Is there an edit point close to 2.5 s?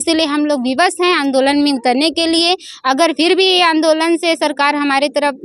no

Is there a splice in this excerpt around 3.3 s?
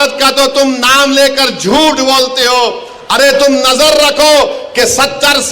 yes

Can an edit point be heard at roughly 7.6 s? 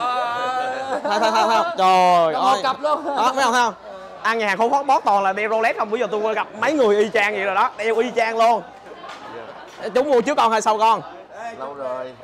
no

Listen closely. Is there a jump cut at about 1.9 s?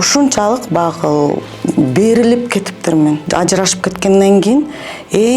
no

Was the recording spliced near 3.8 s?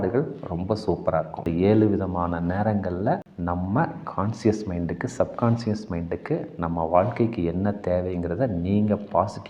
no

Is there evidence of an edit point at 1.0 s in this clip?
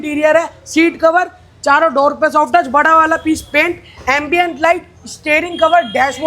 no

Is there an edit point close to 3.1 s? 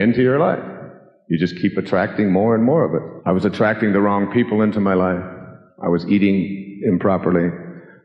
yes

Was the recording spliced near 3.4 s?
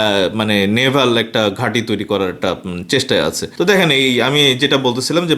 yes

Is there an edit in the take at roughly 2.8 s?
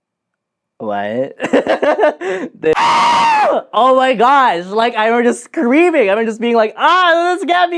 yes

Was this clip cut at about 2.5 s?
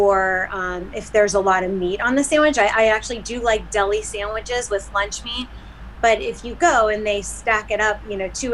no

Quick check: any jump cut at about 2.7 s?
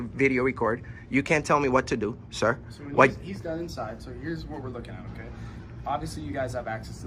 no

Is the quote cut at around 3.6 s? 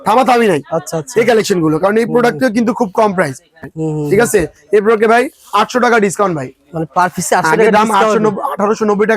yes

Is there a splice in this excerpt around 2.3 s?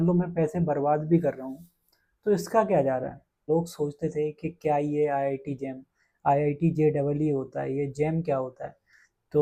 no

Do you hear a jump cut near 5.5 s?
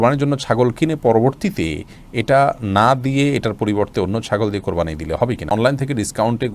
yes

